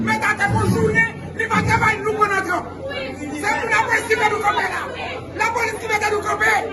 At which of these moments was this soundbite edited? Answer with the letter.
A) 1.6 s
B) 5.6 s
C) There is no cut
C